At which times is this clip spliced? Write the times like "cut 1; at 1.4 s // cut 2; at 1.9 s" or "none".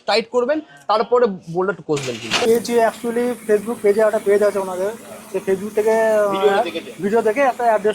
cut 1; at 2.5 s